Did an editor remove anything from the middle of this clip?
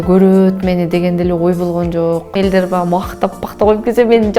yes; 1 cut; at 2.3 s

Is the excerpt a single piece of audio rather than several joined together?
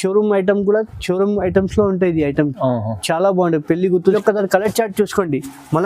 no; 1 cut; at 4.1 s

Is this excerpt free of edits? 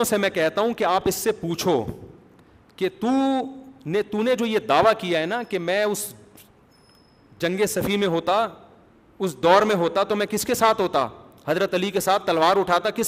yes; 0 cuts

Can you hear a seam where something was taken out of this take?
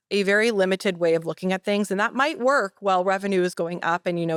no; 0 cuts

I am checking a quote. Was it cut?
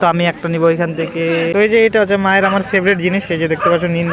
yes; 1 cut; at 1.5 s

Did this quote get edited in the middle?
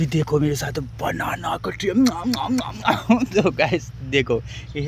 no; 0 cuts

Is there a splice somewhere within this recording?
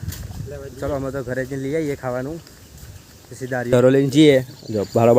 yes; 1 cut; at 3.7 s

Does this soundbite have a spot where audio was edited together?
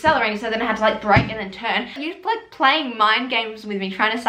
yes; 1 cut; at 2.0 s

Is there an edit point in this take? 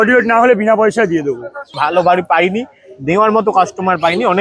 yes; 1 cut; at 1.8 s

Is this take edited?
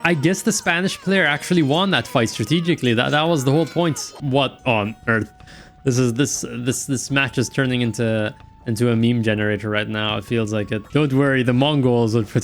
yes; 2 cuts; at 4.2 s, 10.8 s

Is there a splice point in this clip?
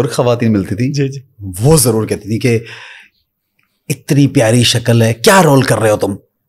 no; 0 cuts

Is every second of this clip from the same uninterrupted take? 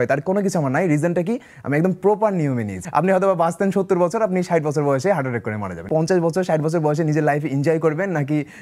no; 2 cuts; at 2.8 s, 5.9 s

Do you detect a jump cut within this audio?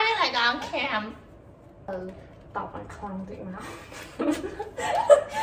yes; 1 cut; at 1.6 s

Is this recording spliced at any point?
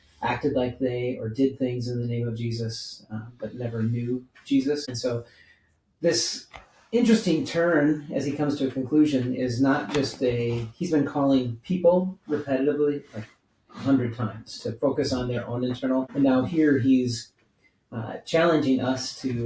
yes; 2 cuts; at 4.9 s, 16.1 s

